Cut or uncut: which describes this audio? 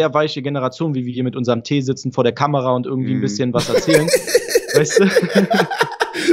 uncut